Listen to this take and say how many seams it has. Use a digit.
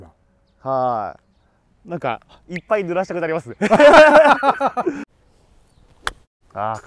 1